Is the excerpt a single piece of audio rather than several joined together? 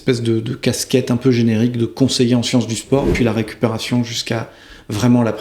no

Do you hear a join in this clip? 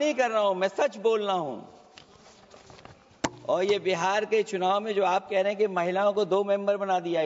no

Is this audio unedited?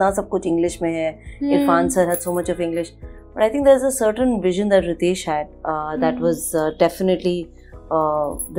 yes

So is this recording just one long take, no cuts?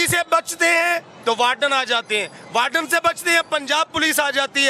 yes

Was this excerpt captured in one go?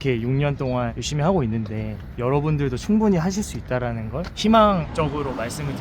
no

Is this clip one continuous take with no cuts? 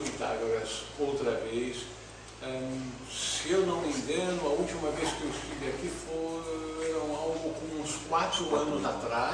yes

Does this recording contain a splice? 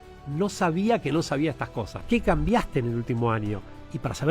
yes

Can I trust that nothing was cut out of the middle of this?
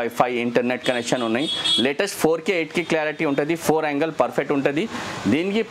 yes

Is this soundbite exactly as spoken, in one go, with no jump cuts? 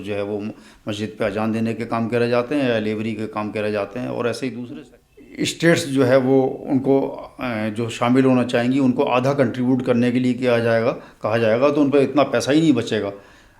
no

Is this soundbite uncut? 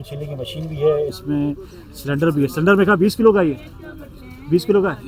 yes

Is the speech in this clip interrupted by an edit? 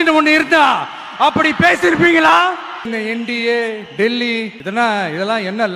yes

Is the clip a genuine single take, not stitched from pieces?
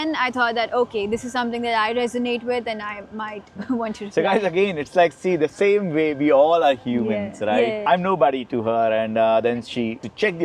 no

